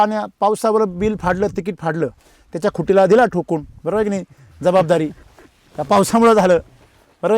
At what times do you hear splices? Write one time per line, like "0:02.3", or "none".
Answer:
none